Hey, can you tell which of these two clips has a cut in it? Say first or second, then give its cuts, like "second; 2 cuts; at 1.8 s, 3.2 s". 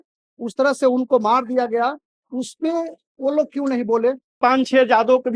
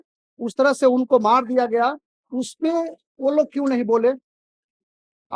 first; 1 cut; at 4.4 s